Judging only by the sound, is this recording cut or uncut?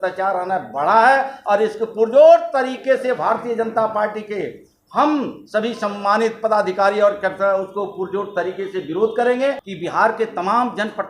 cut